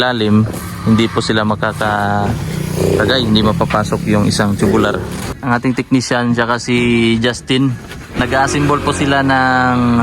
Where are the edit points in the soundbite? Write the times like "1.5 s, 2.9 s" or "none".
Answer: 5.3 s, 8.2 s